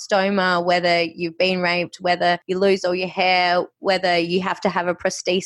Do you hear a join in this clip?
no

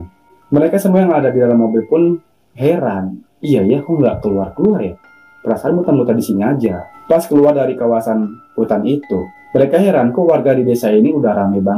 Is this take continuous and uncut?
no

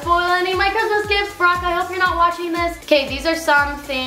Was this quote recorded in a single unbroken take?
no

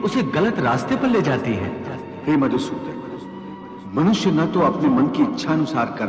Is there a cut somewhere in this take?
no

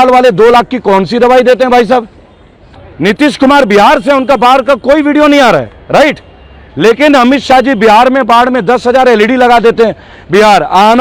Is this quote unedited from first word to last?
yes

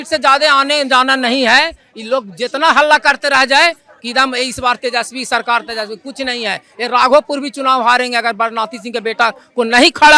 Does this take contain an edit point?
no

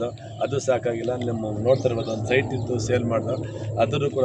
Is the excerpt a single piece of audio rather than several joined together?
yes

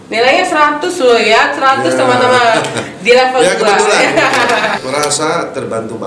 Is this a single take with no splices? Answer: no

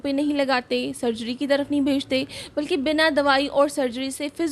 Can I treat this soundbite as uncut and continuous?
yes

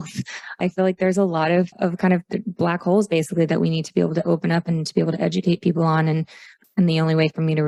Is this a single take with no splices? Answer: yes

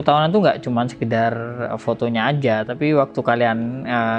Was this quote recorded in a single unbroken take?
yes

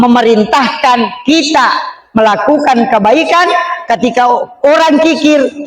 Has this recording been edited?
no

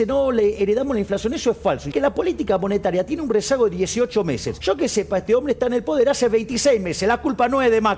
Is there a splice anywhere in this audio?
yes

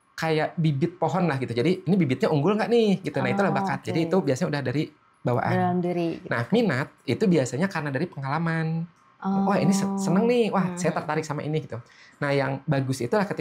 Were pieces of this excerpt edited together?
no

